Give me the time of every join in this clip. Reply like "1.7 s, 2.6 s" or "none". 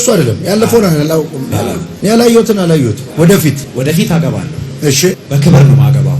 1.9 s, 3.0 s, 3.7 s, 5.2 s